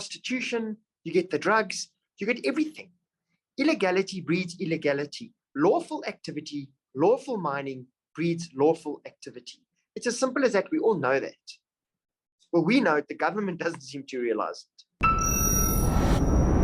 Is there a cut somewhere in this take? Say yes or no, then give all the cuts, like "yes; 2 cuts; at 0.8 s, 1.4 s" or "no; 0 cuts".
yes; 1 cut; at 14.8 s